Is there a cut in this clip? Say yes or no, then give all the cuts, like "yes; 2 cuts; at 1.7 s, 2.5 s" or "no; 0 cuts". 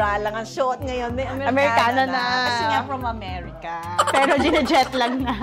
no; 0 cuts